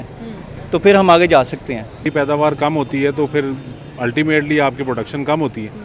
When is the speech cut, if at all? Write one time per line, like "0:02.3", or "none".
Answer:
0:02.1